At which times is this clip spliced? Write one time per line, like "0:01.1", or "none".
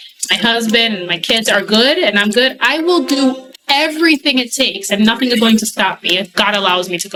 none